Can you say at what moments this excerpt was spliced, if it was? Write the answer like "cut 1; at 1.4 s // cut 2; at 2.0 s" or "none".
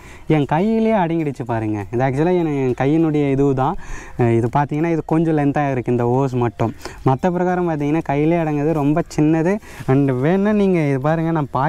none

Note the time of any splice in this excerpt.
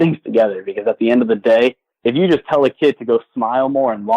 cut 1; at 1.9 s

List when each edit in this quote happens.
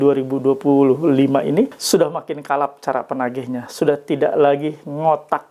cut 1; at 1.8 s

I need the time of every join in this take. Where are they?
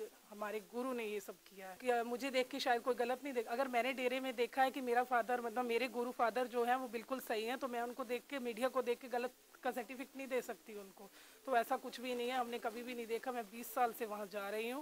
cut 1; at 1.8 s

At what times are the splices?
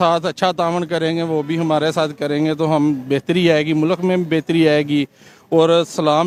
none

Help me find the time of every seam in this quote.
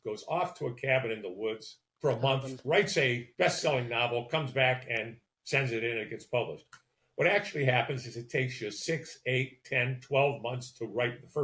none

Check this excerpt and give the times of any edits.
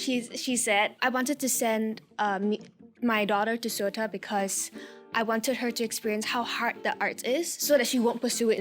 cut 1; at 0.9 s

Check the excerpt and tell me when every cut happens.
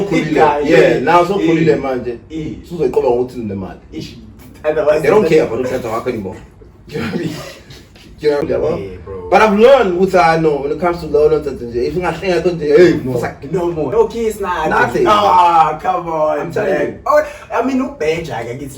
cut 1; at 8.4 s // cut 2; at 13.9 s

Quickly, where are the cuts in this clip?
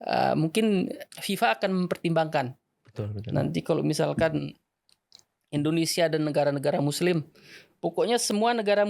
cut 1; at 1.0 s

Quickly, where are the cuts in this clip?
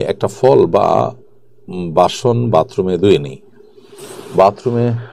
none

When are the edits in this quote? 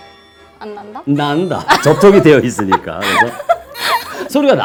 none

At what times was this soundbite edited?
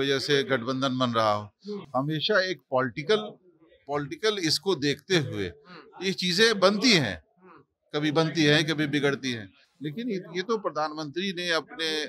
none

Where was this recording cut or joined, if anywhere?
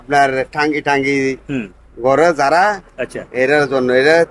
none

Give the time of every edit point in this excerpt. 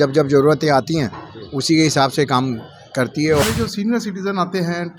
cut 1; at 3.4 s

